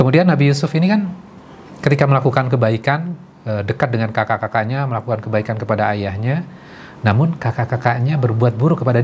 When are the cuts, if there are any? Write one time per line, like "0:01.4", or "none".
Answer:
none